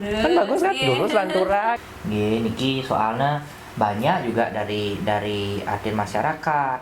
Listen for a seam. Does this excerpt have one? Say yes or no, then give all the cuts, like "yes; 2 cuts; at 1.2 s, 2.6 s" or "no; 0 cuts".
yes; 1 cut; at 1.9 s